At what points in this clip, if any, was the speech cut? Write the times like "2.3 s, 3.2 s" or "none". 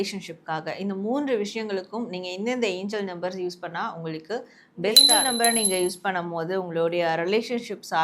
5.2 s